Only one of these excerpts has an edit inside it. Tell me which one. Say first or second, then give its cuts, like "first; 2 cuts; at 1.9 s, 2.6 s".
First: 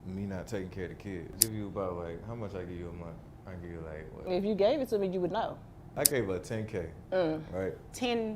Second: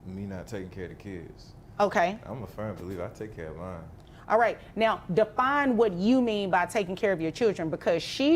first; 2 cuts; at 1.3 s, 5.9 s